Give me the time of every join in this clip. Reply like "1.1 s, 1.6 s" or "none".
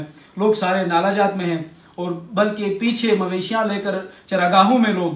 none